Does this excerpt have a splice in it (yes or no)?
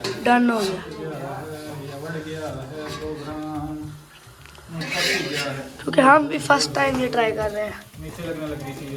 no